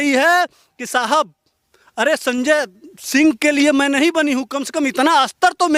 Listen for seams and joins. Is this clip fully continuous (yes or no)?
yes